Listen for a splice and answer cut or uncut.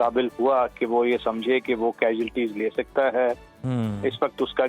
uncut